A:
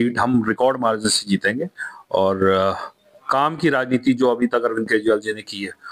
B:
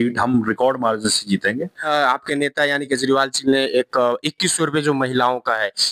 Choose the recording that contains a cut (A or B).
B